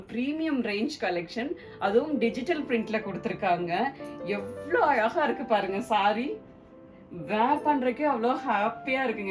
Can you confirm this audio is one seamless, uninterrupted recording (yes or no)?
yes